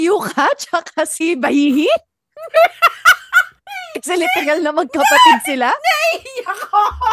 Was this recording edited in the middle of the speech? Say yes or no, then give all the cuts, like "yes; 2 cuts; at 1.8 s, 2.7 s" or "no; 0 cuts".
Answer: yes; 1 cut; at 1.2 s